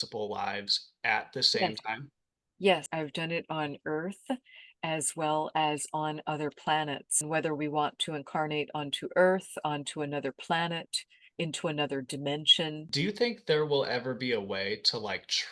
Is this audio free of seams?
no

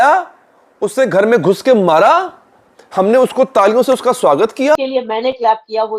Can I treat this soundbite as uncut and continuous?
no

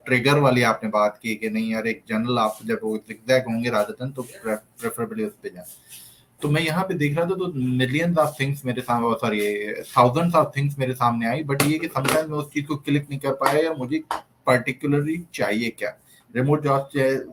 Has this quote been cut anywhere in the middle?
no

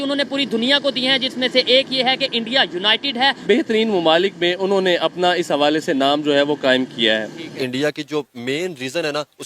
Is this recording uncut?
no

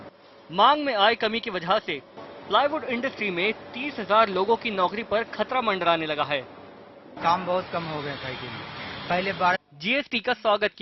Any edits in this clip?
no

